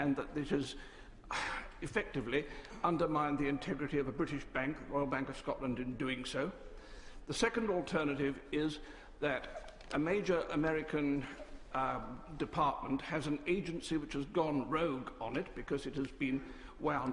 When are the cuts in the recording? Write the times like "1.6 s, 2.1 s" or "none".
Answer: 8.0 s